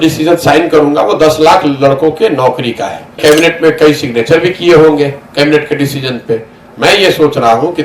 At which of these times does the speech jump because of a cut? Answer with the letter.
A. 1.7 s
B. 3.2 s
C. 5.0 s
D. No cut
B